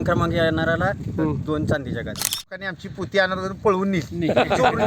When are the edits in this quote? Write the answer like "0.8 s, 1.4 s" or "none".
2.6 s